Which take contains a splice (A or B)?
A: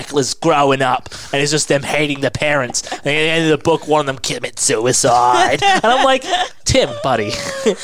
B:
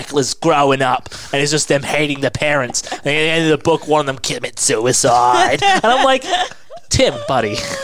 A